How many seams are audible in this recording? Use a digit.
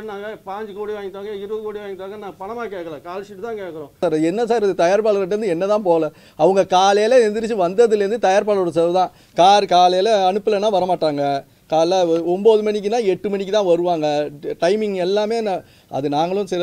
1